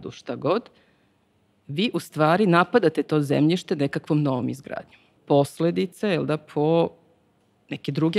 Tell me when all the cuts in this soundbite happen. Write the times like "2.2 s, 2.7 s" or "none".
5.1 s